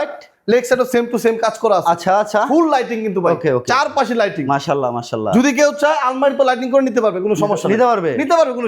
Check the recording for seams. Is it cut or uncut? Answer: uncut